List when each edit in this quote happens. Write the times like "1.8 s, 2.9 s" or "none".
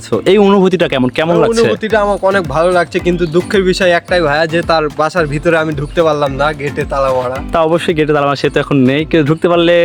none